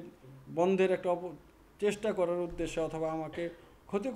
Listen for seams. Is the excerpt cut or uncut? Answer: uncut